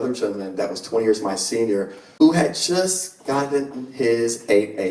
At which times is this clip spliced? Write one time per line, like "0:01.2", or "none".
0:02.0